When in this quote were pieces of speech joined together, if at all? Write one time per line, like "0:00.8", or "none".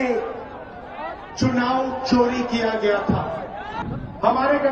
0:03.8